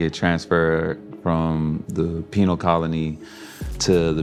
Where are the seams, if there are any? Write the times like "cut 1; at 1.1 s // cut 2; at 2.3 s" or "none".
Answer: none